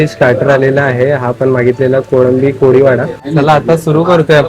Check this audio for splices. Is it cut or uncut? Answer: cut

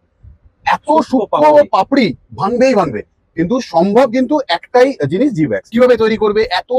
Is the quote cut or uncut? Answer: cut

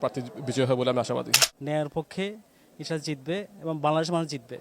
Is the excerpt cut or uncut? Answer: cut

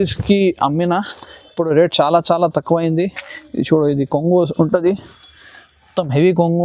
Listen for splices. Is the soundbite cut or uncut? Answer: uncut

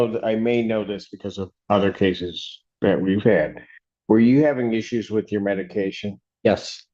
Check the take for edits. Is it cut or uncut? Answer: uncut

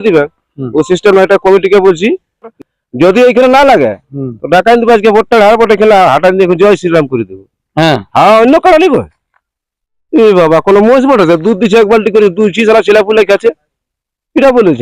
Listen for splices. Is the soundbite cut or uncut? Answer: cut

